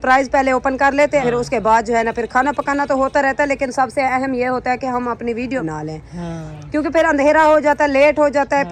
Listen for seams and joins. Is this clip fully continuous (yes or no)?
no